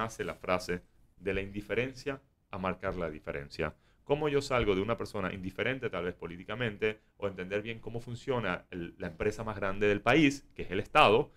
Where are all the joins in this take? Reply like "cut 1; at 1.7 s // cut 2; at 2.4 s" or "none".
none